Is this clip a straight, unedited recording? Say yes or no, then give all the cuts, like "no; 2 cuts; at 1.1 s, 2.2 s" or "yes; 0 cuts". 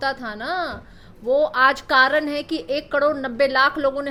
yes; 0 cuts